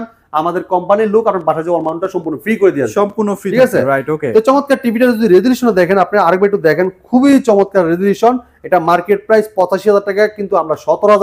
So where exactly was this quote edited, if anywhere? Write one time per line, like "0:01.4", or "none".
none